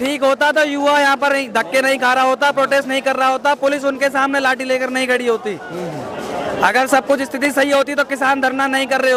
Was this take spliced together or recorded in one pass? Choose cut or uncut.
uncut